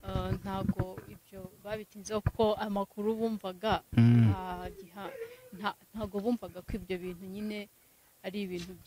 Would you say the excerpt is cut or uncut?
uncut